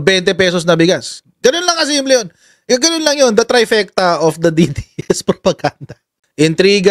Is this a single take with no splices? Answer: yes; 0 cuts

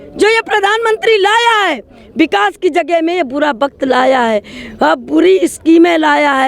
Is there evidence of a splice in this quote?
no; 0 cuts

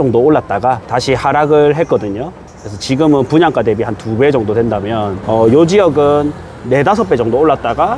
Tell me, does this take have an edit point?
yes; 2 cuts; at 0.9 s, 5.2 s

